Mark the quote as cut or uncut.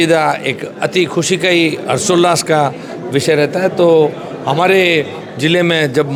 uncut